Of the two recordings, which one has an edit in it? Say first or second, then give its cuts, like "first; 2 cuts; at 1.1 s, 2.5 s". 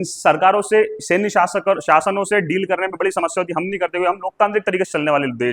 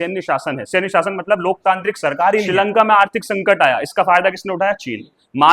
second; 1 cut; at 2.5 s